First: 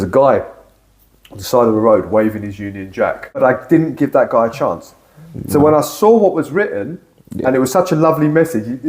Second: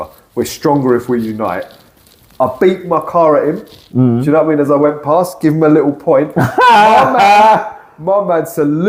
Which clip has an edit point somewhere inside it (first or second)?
first